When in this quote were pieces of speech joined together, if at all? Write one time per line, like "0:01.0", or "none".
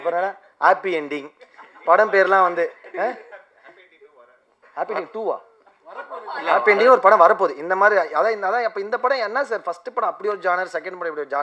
none

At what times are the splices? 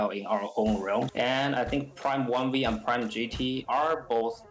0:01.1

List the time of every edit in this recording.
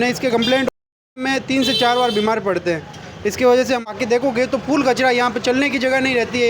0:01.2
0:03.8

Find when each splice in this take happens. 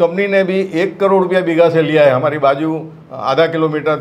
none

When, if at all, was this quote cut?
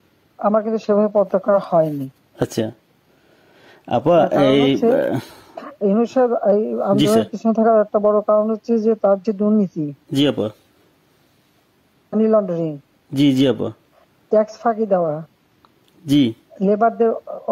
none

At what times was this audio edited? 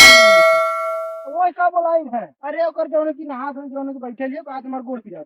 0:01.2

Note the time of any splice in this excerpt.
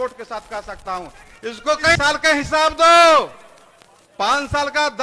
0:02.0

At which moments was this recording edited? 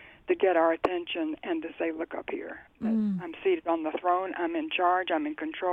none

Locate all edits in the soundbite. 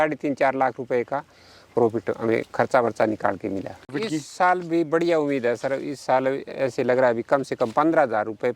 0:04.0

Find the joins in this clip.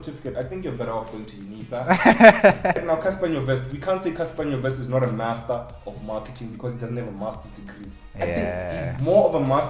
0:02.8

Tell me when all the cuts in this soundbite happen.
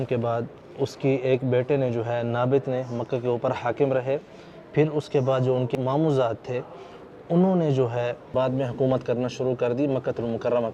none

